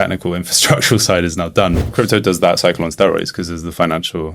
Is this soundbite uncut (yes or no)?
no